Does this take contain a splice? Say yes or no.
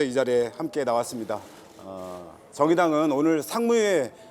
no